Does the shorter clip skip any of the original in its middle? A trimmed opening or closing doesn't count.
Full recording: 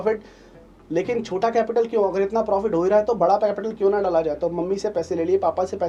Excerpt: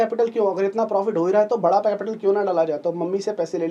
no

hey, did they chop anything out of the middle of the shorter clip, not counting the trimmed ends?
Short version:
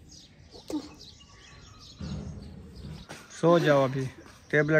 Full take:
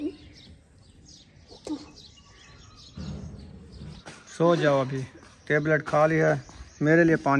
no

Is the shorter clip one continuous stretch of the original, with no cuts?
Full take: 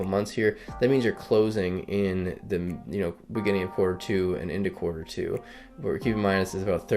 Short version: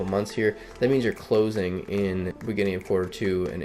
no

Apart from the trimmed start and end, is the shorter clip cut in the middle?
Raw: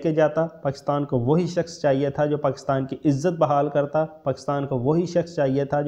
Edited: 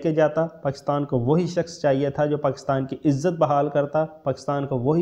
no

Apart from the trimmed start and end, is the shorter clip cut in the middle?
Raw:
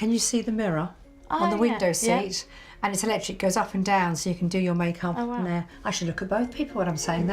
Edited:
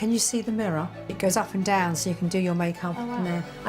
yes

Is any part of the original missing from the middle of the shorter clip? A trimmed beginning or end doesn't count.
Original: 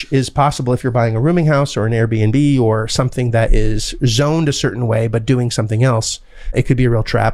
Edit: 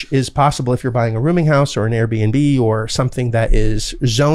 no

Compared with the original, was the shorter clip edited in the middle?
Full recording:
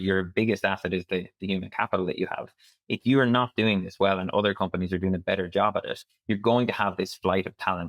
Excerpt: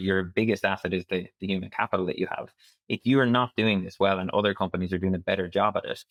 no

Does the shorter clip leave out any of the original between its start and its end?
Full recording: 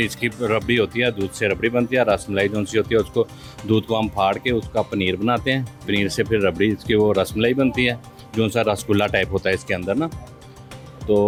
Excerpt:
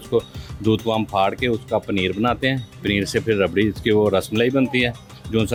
no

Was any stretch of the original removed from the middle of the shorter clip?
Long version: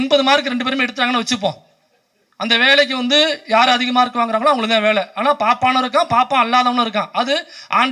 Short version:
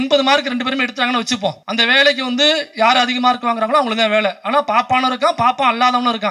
yes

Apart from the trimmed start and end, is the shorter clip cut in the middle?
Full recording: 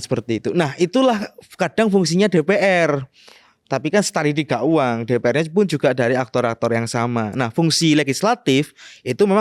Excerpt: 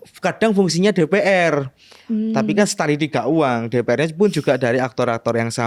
no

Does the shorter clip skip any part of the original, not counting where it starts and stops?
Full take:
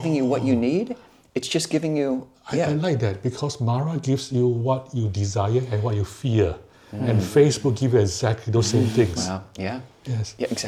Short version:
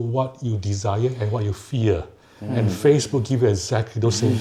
no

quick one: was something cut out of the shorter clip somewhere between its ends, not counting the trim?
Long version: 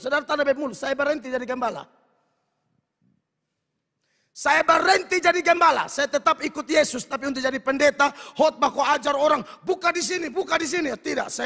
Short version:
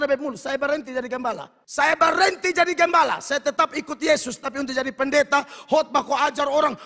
yes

